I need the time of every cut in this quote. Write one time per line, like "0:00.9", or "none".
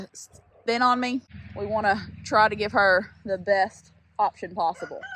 0:01.4